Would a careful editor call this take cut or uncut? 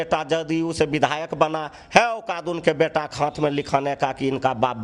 uncut